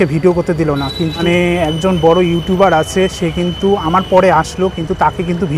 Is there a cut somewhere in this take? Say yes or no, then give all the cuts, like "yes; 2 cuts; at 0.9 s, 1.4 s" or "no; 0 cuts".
yes; 1 cut; at 1.2 s